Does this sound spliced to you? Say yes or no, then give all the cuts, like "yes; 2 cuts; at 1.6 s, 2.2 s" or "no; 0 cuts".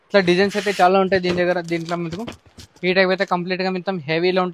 no; 0 cuts